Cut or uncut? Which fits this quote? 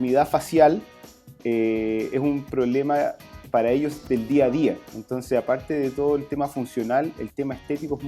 uncut